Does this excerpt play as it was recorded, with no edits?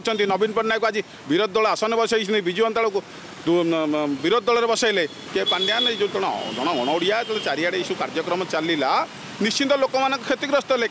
no; 1 cut; at 5.2 s

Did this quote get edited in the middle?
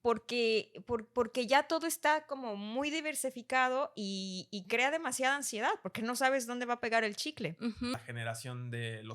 yes; 1 cut; at 7.9 s

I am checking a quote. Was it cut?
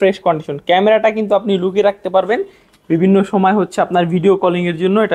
no; 0 cuts

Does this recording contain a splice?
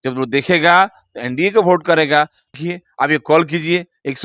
yes; 1 cut; at 2.5 s

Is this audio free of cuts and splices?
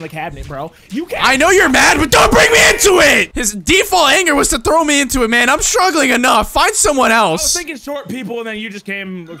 no; 1 cut; at 3.3 s

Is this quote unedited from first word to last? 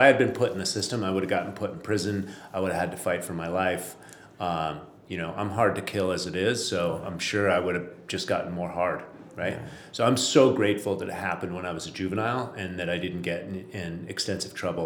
yes; 0 cuts

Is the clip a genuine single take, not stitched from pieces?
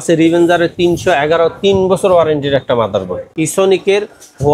no; 1 cut; at 3.2 s

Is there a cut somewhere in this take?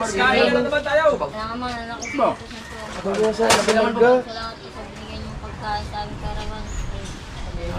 no; 0 cuts

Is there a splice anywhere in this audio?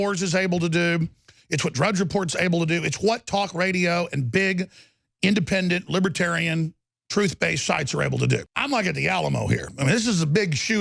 yes; 1 cut; at 8.5 s

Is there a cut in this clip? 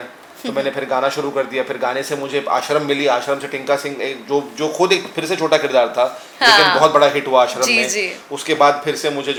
no; 0 cuts

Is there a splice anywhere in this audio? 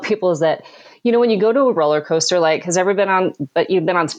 no; 0 cuts

